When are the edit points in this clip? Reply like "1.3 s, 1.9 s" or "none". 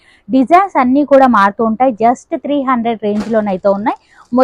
none